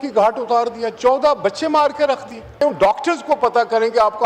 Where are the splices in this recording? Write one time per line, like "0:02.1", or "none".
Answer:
0:02.6